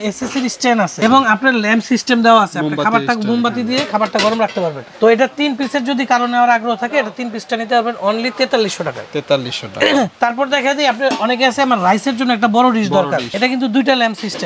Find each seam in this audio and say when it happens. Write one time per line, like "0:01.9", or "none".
none

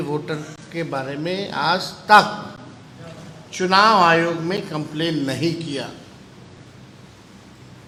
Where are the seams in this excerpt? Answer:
none

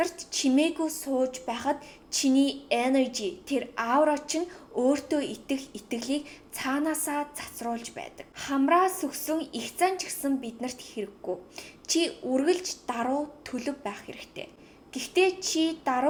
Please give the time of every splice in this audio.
none

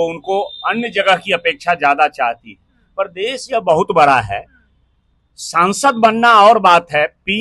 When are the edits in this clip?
none

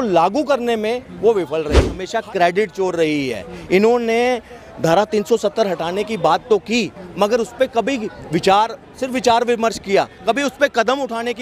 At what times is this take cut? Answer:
0:02.0

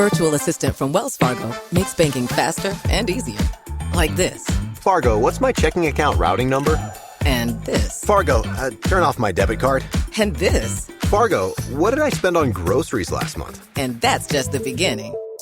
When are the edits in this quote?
none

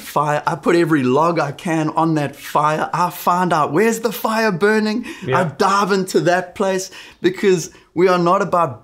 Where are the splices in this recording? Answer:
0:07.0

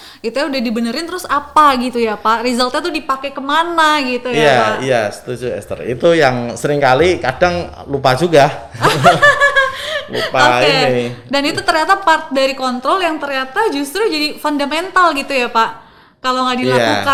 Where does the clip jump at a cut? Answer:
none

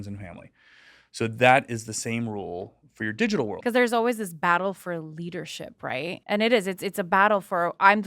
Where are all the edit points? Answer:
0:03.6
0:06.2

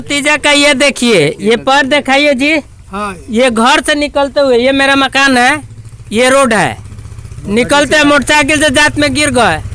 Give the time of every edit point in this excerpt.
none

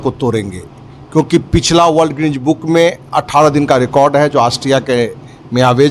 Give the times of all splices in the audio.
none

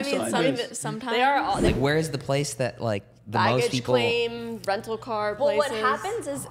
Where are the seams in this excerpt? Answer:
0:01.7

